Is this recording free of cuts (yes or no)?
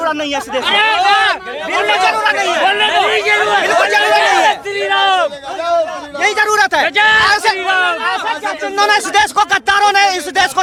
yes